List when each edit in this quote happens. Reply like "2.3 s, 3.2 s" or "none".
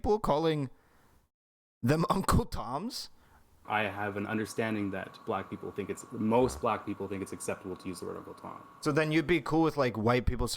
3.6 s

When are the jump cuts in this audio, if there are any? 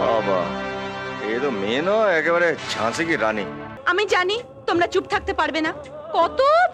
3.7 s

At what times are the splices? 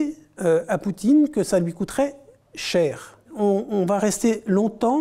3.3 s

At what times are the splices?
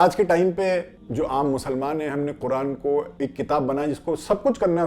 1.0 s, 3.1 s

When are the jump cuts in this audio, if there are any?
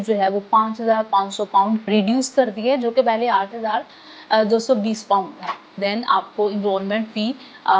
5.7 s

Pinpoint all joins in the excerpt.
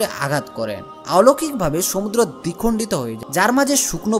3.2 s

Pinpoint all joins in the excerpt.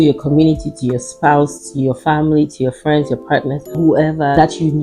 none

